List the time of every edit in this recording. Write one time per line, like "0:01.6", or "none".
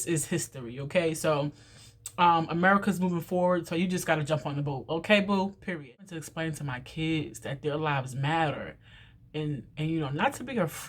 0:06.2